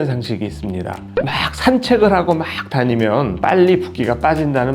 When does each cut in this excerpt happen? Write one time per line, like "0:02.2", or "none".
none